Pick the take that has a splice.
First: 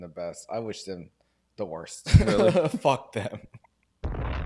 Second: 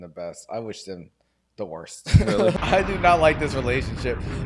second; 1 cut; at 2.5 s

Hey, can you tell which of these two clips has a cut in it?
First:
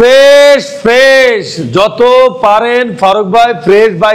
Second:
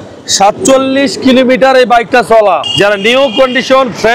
second; 1 cut; at 2.6 s

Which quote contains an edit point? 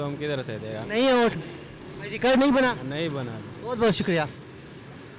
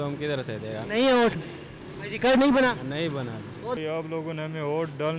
second; 1 cut; at 3.8 s

